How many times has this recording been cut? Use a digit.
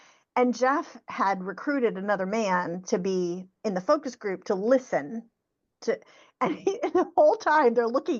0